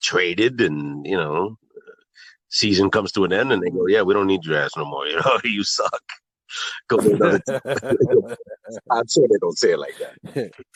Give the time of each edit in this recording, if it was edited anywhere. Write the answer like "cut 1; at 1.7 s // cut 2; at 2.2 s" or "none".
none